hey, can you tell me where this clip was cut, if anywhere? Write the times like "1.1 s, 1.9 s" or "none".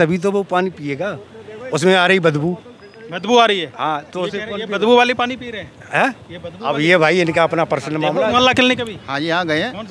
8.3 s